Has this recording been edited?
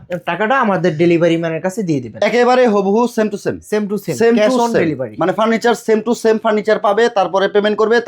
no; 0 cuts

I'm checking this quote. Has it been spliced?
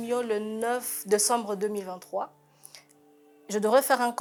no; 0 cuts

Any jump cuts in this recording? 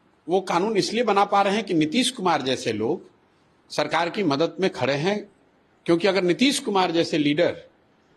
no; 0 cuts

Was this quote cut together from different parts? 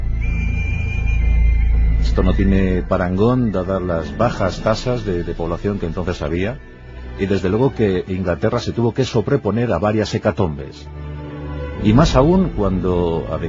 yes; 1 cut; at 12.2 s

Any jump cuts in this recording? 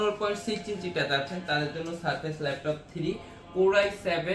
no; 0 cuts

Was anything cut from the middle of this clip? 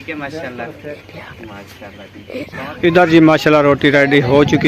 yes; 1 cut; at 2.7 s

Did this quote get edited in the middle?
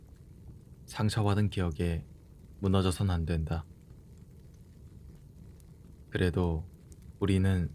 yes; 2 cuts; at 4.2 s, 6.1 s

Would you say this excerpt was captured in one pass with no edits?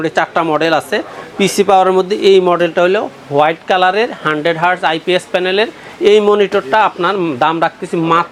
yes; 0 cuts

